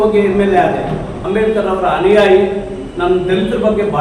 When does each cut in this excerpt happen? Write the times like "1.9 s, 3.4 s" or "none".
1.2 s

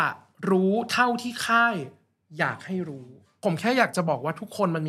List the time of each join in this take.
3.4 s

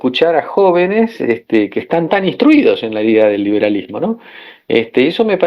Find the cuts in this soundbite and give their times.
none

